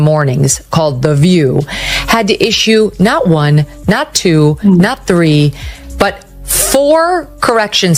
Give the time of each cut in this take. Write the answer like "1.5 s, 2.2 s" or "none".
none